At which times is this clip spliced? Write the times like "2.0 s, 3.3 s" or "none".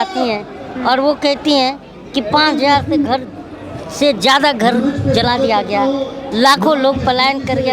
none